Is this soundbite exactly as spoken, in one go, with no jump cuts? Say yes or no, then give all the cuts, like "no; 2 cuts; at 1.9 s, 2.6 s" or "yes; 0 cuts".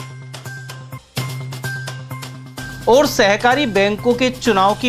no; 1 cut; at 2.4 s